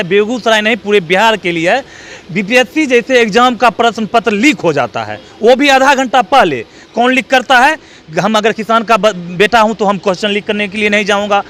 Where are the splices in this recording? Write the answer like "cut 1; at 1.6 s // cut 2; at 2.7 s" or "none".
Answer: none